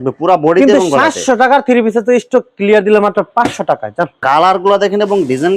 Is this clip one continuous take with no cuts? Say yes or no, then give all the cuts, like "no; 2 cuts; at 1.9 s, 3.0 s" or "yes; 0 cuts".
no; 1 cut; at 4.2 s